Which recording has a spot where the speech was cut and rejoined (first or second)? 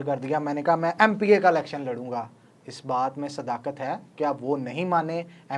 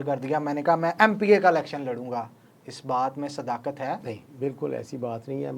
second